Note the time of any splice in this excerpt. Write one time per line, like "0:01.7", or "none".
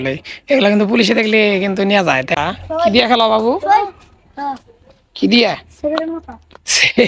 0:02.4